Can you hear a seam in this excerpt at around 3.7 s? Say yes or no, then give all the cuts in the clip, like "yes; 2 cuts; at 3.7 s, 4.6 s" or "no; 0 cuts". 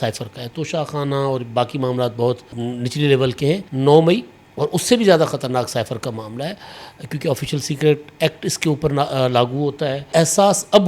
yes; 3 cuts; at 2.5 s, 3.7 s, 10.1 s